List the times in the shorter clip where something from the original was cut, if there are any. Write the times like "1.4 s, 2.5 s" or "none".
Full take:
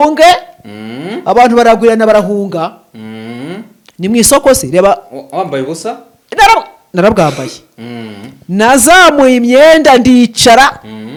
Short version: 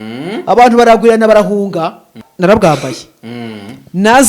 2.2 s

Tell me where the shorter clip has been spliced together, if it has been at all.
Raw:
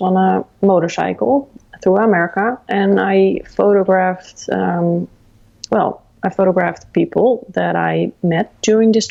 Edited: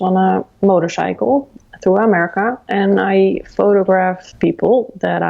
4.3 s

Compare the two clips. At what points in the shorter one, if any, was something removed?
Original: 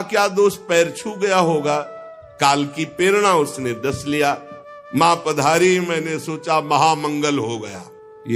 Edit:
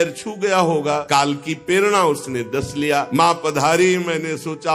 1.0 s, 3.1 s

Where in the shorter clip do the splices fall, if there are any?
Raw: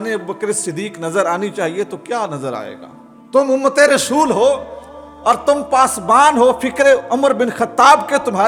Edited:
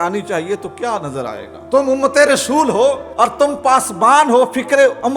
1.5 s, 3.1 s

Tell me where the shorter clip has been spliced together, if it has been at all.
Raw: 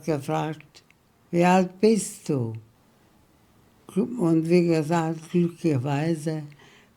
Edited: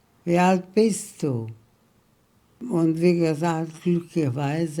2.6 s

